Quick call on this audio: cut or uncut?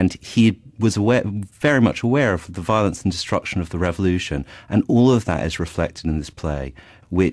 cut